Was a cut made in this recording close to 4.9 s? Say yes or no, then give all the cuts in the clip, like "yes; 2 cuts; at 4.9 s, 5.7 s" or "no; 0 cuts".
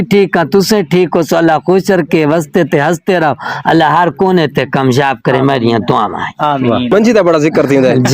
no; 1 cut; at 6.9 s